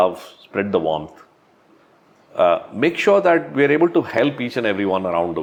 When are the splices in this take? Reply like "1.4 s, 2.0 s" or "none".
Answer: none

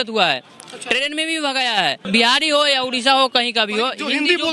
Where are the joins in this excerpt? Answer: 2.0 s

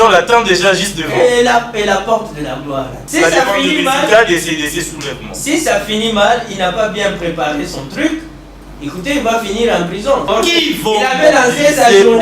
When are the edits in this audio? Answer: 3.0 s, 10.3 s

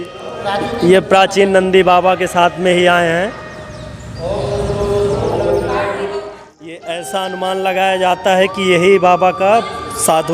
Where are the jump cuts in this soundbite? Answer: 6.8 s

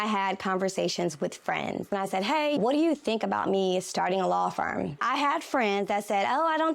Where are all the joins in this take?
1.9 s, 5.0 s

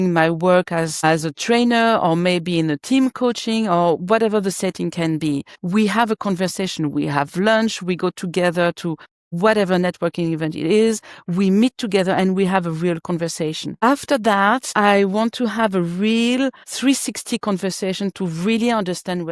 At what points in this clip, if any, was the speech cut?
none

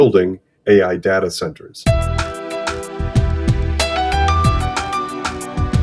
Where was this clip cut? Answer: 1.7 s

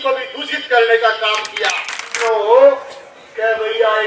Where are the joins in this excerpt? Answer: 2.2 s

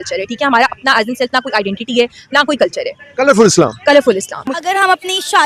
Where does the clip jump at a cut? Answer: none

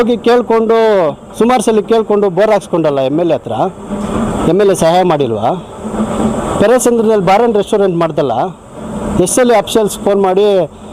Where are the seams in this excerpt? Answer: none

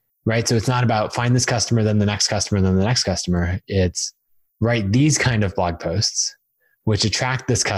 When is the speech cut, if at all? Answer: none

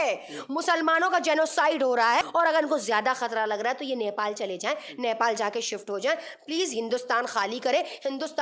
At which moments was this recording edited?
2.2 s

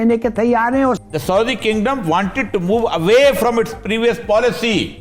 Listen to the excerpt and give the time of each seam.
1.0 s

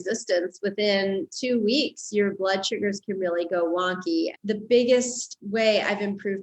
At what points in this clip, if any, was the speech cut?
4.3 s

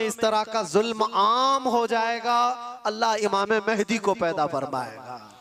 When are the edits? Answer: none

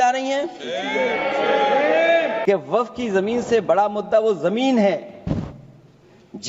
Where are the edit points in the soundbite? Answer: 2.4 s

